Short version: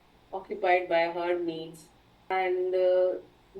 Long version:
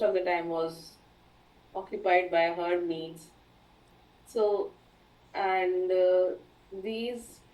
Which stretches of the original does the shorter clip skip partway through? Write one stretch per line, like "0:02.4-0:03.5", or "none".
0:03.7-0:05.5